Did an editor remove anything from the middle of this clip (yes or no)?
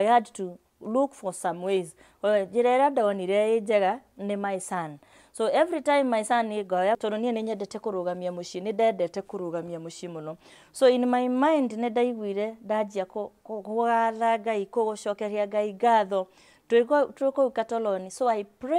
yes